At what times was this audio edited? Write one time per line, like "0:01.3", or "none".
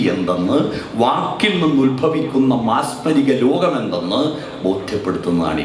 none